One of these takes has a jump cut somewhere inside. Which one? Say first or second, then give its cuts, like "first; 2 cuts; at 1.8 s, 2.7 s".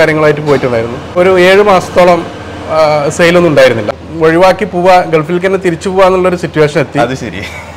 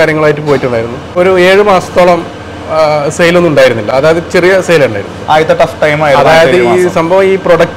first; 1 cut; at 3.8 s